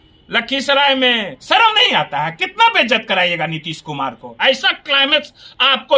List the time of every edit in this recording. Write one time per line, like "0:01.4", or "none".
0:01.3
0:04.3